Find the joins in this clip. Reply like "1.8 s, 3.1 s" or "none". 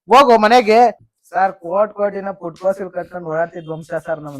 1.1 s